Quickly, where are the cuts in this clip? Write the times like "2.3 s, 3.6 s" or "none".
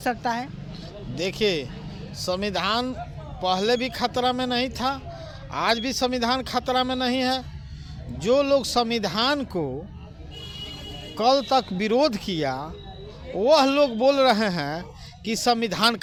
none